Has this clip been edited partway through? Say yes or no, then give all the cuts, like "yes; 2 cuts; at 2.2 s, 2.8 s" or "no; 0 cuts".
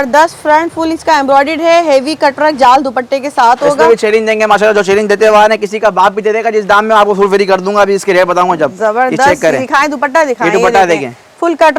no; 0 cuts